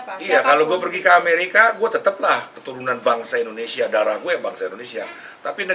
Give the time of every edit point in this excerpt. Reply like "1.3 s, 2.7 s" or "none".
none

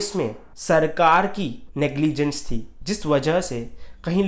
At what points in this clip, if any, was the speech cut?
none

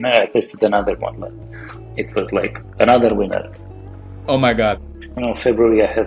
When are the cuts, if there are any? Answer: 4.8 s

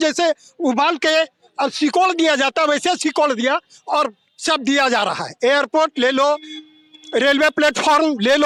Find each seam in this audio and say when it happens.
none

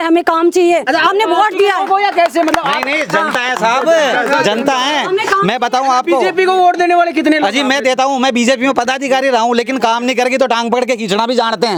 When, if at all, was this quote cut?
none

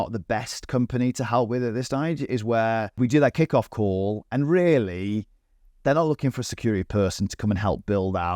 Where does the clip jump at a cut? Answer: 2.9 s

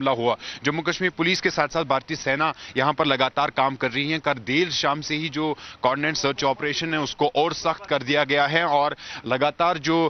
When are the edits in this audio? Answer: none

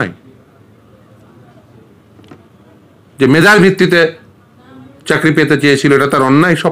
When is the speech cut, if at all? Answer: none

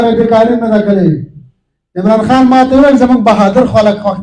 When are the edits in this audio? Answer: none

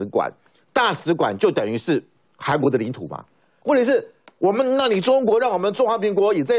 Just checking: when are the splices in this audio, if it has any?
3.4 s

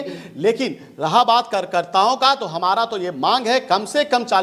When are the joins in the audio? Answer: none

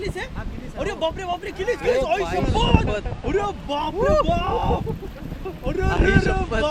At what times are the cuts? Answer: none

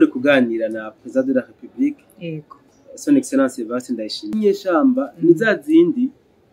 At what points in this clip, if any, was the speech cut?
4.3 s

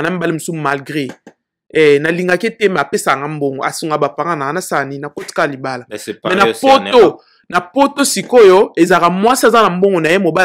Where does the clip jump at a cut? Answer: none

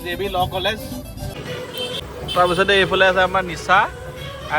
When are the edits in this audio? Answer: 1.4 s

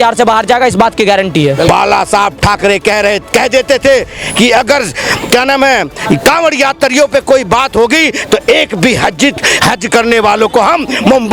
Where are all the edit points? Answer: 1.7 s

